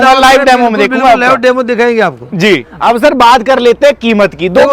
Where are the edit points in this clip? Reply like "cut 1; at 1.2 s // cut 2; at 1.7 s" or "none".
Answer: cut 1; at 2.7 s